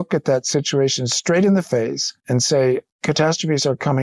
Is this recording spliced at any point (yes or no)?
yes